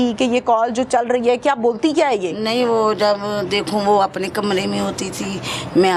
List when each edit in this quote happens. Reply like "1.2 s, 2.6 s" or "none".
none